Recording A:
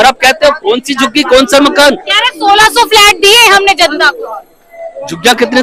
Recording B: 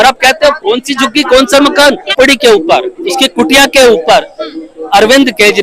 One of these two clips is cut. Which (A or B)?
B